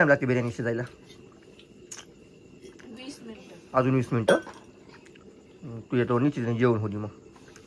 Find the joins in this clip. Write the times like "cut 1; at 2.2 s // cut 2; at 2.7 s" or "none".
none